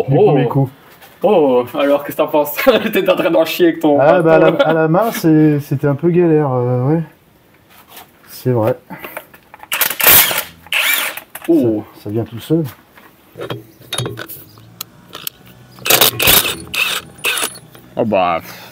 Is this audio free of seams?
no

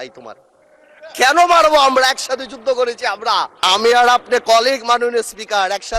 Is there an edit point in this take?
yes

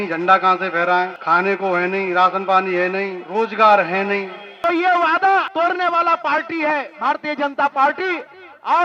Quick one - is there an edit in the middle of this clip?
yes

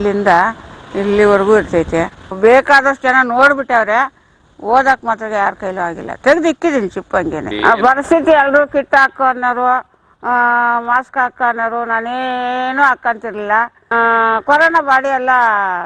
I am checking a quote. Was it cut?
yes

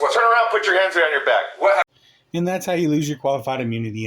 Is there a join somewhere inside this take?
no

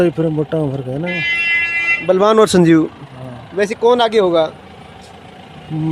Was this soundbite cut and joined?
no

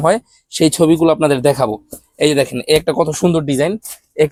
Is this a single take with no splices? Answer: yes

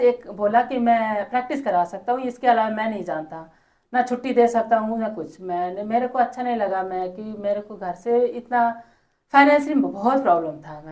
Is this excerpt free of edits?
yes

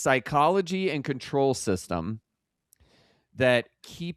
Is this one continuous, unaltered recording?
yes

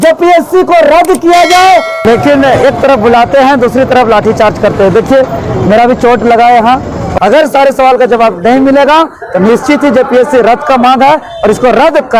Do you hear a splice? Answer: yes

